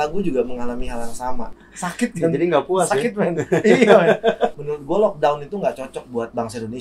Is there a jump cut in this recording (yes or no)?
yes